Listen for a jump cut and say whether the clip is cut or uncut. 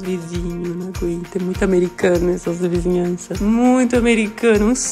uncut